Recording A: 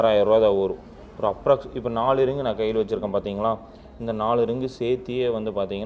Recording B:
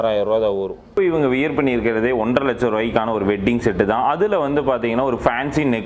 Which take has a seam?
B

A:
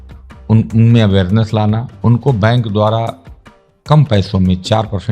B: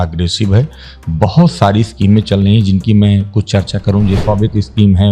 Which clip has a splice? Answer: B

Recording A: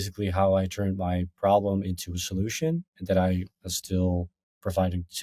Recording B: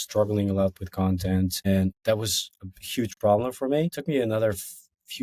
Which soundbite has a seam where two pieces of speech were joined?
B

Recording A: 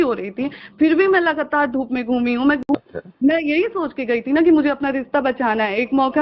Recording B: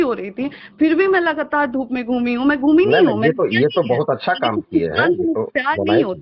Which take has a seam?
A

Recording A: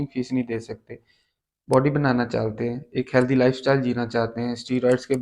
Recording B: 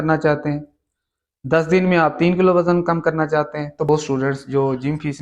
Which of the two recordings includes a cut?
B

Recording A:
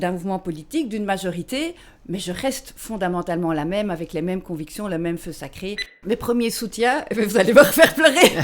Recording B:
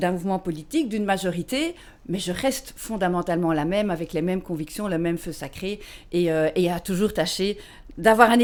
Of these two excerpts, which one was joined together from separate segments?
A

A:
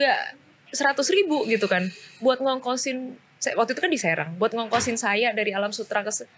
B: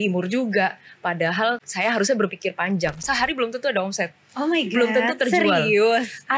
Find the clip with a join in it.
B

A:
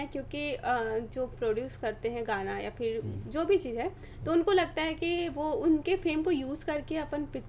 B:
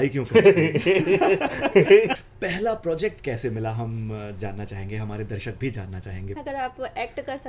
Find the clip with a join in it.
B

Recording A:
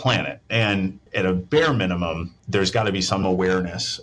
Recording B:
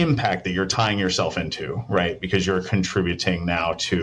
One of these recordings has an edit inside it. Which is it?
A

